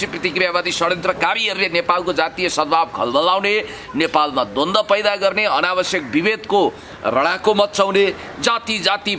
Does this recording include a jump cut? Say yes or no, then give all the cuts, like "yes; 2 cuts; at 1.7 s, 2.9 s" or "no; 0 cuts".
no; 0 cuts